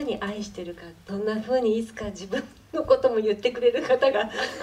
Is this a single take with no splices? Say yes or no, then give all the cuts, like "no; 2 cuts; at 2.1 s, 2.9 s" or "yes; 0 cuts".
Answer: no; 1 cut; at 1.0 s